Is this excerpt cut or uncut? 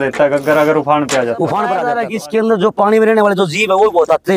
cut